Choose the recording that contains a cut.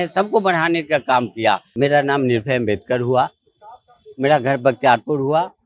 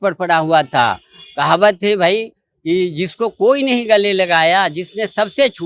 first; 1 cut; at 1.7 s

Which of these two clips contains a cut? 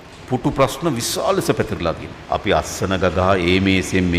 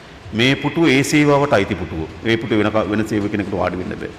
first; 1 cut; at 2.1 s

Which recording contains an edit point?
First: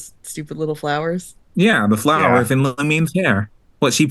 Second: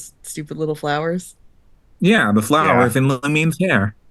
first; 1 cut; at 1.4 s

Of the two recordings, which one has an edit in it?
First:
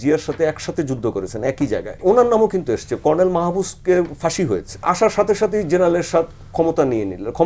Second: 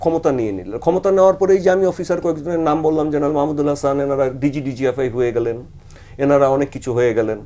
first; 2 cuts; at 2.0 s, 4.8 s

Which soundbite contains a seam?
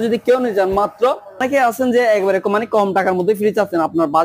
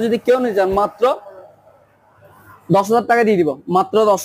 first; 1 cut; at 1.4 s

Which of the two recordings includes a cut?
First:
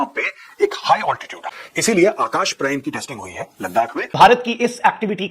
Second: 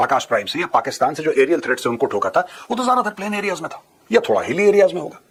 first; 2 cuts; at 1.7 s, 4.1 s

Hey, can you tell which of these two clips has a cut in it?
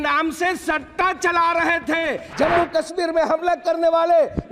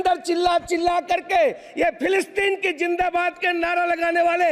first; 1 cut; at 2.2 s

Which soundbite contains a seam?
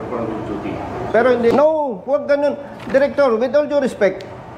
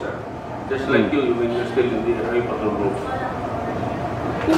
first; 1 cut; at 1.5 s

